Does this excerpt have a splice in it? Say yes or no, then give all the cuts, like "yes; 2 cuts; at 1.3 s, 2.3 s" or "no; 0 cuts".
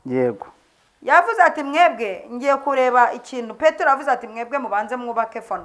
no; 0 cuts